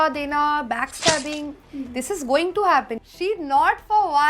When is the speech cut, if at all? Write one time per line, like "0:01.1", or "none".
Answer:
0:03.0